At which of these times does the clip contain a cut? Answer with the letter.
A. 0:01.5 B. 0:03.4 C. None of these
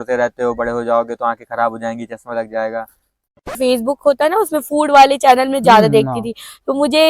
B